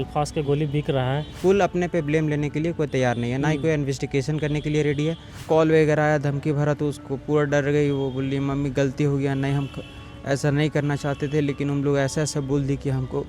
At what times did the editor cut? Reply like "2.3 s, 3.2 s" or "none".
1.3 s, 5.4 s